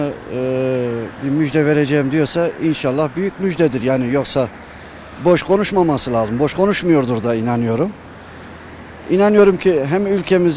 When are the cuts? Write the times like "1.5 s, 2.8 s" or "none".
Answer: none